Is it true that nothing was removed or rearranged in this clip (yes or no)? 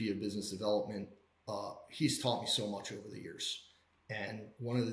yes